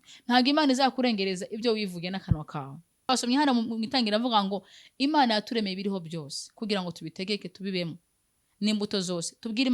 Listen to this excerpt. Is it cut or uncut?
cut